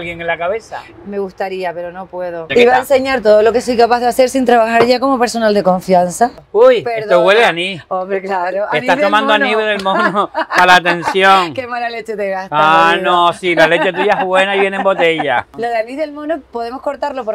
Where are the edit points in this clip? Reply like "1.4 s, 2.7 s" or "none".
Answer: 2.5 s, 6.4 s, 15.5 s